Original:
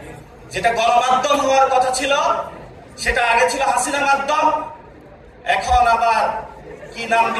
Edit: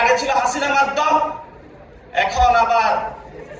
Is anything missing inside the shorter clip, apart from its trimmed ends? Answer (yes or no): no